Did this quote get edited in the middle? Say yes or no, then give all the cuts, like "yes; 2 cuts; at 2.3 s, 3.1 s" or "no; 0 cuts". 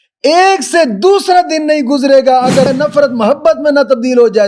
yes; 1 cut; at 2.7 s